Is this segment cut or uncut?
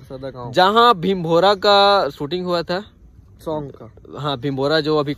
uncut